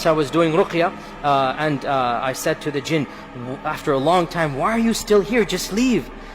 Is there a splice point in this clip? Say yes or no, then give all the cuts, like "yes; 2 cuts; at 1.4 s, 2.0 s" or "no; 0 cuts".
no; 0 cuts